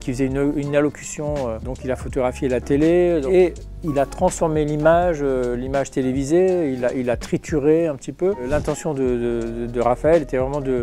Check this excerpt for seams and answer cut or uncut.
uncut